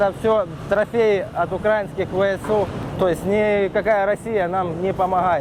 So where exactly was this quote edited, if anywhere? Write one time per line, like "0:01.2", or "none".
none